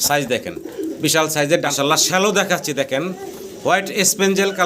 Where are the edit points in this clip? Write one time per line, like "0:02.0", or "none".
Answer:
0:01.7